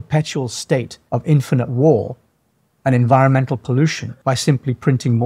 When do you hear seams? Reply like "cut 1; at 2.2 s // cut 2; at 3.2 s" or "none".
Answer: cut 1; at 1.0 s // cut 2; at 4.1 s